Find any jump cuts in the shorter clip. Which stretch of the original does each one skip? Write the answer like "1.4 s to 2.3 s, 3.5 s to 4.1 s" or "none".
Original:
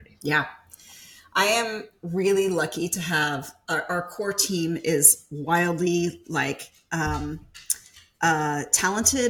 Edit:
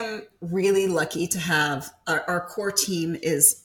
none